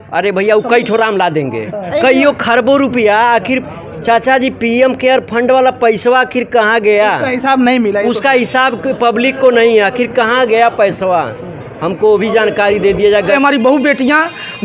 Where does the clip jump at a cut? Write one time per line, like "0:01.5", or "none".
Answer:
0:01.7
0:13.3